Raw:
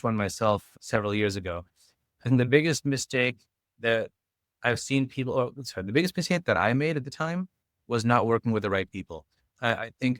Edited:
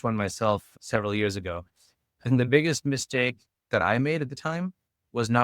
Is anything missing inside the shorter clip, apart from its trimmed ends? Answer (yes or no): yes